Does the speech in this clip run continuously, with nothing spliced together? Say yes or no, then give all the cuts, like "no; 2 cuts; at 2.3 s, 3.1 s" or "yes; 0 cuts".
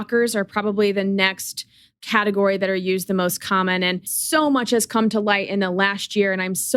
yes; 0 cuts